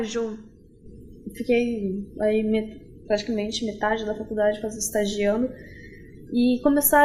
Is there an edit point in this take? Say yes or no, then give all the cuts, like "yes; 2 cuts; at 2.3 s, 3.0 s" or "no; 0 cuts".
no; 0 cuts